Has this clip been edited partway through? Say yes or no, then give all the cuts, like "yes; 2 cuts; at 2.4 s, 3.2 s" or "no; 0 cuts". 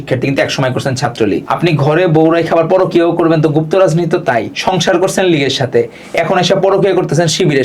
yes; 2 cuts; at 1.4 s, 4.5 s